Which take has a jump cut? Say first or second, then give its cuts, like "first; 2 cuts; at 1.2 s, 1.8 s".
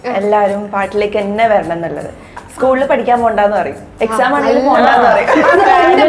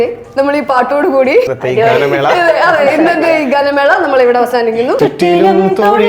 second; 2 cuts; at 1.5 s, 5.0 s